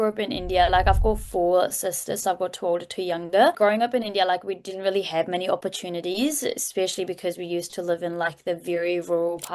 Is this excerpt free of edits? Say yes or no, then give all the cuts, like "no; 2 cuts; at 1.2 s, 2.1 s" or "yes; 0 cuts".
no; 1 cut; at 3.6 s